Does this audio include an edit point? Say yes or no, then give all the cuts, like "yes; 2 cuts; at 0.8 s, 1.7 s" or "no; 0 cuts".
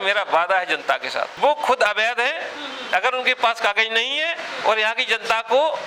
yes; 1 cut; at 1.3 s